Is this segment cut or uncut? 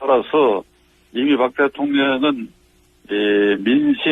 uncut